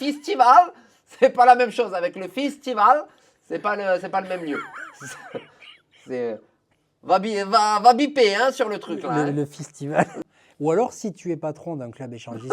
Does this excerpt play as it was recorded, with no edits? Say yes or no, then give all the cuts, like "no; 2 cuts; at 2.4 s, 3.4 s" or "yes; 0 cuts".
no; 1 cut; at 10.2 s